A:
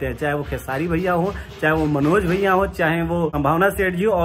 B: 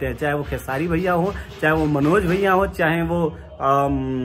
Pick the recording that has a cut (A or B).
A